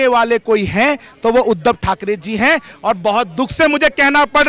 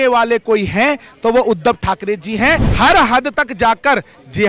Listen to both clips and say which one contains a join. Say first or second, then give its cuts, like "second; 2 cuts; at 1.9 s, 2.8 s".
second; 1 cut; at 2.7 s